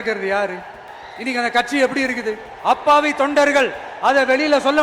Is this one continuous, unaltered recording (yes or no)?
no